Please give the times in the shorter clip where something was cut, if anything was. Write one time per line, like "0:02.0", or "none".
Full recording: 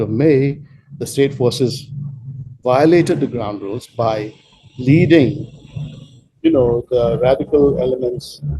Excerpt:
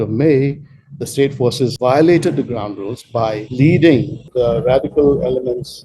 0:01.7
0:03.4
0:04.3